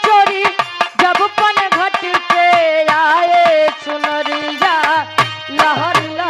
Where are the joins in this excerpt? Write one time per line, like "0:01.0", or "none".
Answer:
none